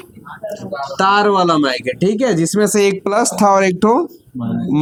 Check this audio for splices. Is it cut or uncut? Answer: uncut